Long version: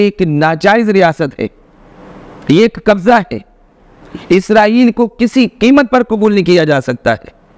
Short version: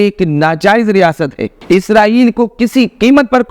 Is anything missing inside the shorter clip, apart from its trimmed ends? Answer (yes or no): yes